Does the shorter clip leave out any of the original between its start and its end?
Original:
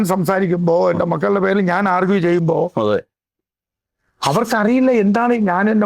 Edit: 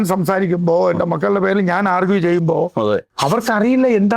yes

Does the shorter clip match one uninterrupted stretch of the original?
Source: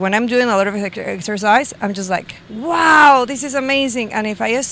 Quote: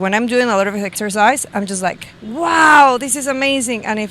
no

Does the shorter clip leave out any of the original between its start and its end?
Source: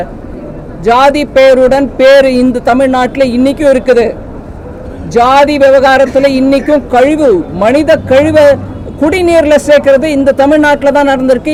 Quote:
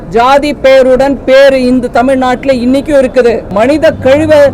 yes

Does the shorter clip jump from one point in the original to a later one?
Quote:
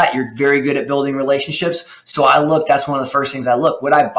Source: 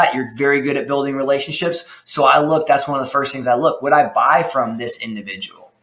no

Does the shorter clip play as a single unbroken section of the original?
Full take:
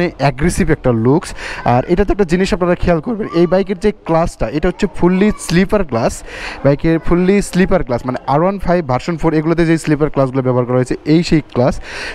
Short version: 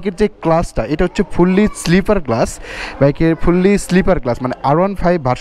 yes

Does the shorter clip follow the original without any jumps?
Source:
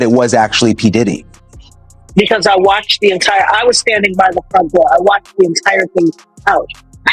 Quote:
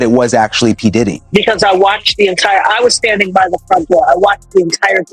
no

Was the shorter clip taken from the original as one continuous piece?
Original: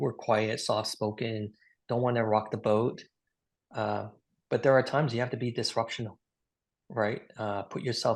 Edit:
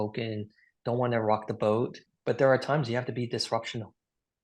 no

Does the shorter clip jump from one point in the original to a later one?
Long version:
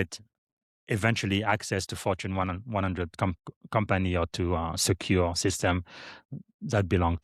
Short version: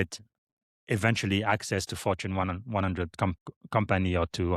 no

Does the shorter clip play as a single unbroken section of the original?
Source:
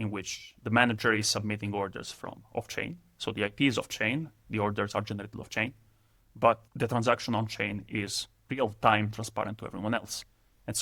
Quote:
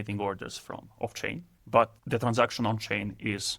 no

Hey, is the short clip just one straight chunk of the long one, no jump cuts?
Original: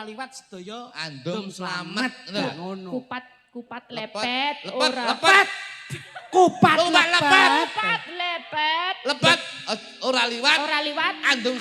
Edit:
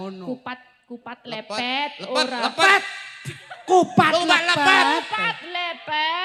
yes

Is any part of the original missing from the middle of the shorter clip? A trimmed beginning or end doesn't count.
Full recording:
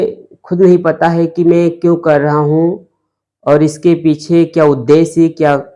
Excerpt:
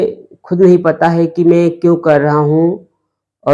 no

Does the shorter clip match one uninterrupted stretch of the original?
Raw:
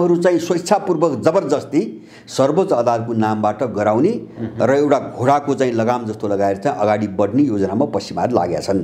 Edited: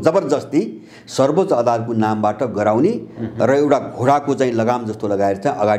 yes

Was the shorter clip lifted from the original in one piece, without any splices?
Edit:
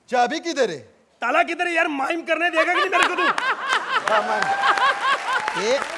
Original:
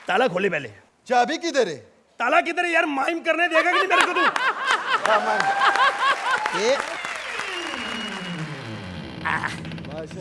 yes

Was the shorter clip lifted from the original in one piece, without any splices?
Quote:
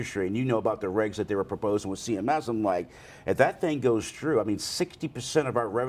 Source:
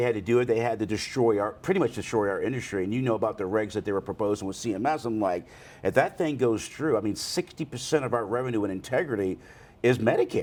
yes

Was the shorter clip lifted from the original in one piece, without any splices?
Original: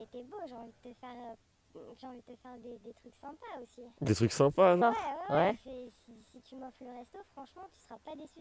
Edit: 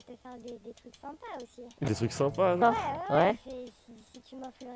yes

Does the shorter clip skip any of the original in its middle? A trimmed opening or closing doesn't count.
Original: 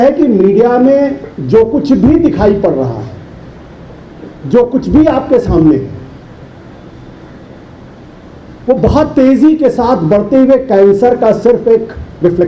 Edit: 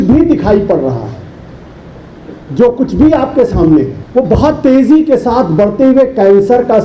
yes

